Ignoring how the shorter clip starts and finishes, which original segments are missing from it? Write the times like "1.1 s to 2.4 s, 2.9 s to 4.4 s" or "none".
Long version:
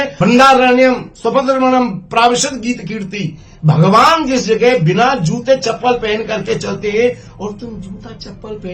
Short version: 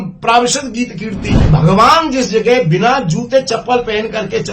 3.3 s to 3.5 s